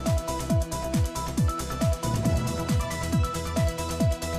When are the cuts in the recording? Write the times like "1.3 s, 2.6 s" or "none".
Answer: none